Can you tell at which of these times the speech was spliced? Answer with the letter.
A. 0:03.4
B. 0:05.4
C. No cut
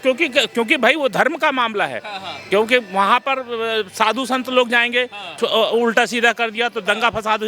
B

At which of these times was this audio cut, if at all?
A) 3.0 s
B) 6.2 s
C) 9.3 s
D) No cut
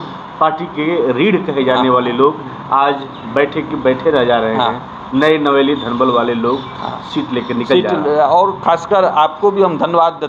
D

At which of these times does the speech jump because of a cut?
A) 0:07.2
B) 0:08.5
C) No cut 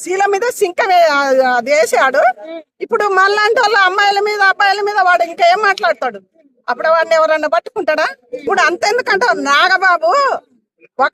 B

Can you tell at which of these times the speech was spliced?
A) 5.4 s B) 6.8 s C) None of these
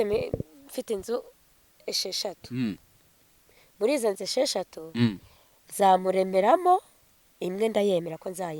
C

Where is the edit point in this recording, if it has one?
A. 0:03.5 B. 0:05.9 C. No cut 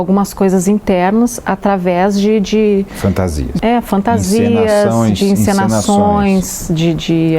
A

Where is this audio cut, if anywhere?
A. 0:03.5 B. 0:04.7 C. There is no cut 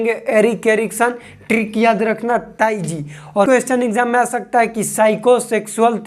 A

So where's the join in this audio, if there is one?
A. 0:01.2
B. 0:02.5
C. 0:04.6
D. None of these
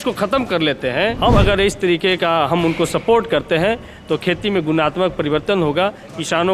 A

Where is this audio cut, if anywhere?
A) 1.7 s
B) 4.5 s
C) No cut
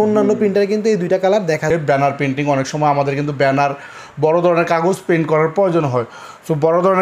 A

